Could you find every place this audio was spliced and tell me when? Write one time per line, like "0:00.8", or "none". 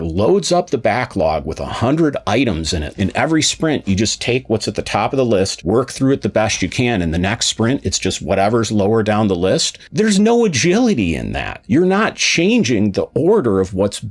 0:02.8
0:05.6